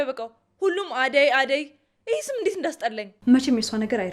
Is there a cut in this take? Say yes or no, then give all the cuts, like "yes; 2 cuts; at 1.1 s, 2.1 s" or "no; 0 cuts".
yes; 1 cut; at 3.1 s